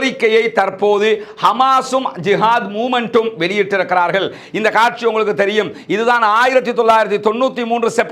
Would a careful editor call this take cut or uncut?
uncut